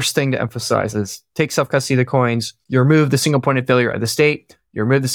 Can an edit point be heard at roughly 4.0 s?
no; 2 cuts; at 0.9 s, 2.5 s

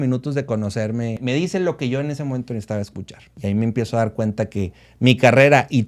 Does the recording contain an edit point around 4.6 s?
no; 2 cuts; at 1.2 s, 3.3 s

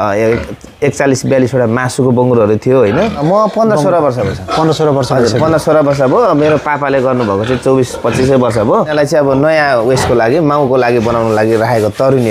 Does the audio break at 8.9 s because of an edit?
yes; 2 cuts; at 3.2 s, 8.9 s

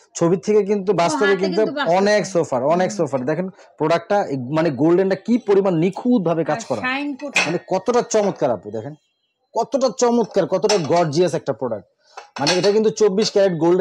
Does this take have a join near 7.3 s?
yes; 1 cut; at 7.3 s

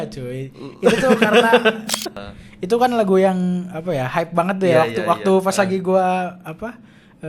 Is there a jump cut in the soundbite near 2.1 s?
yes; 1 cut; at 2.1 s

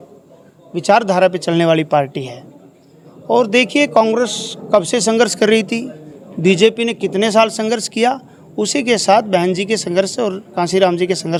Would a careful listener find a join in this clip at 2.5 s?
no; 0 cuts

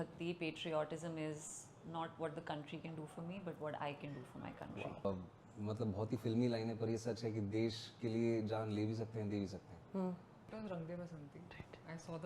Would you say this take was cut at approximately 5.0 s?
yes; 2 cuts; at 5.0 s, 10.5 s

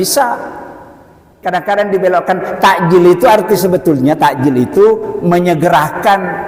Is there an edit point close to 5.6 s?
no; 1 cut; at 1.3 s

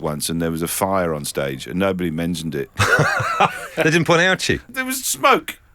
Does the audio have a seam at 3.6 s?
yes; 3 cuts; at 2.7 s, 3.6 s, 4.6 s

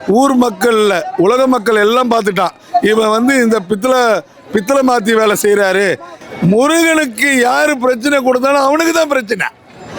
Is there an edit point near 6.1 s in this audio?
yes; 1 cut; at 6.1 s

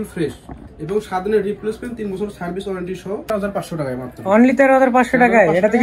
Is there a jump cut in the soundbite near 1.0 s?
no; 1 cut; at 3.3 s

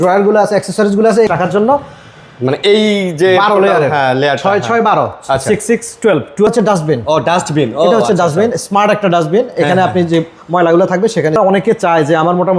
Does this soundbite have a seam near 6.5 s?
yes; 3 cuts; at 1.3 s, 6.5 s, 11.4 s

